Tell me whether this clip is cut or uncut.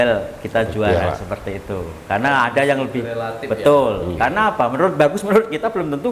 uncut